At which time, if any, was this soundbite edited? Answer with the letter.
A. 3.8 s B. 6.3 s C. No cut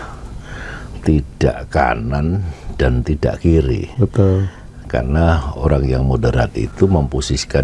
C